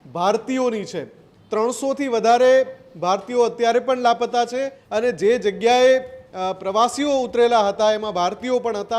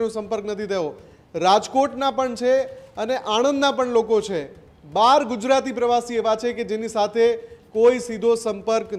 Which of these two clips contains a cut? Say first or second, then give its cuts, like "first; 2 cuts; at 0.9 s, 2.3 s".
first; 1 cut; at 4.8 s